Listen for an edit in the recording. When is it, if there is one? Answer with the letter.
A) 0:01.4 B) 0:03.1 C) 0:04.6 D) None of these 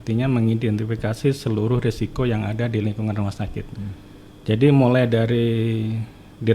D